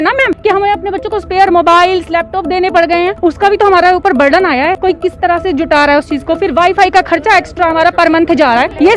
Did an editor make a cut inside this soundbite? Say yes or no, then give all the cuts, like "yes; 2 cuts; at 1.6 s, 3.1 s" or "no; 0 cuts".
no; 0 cuts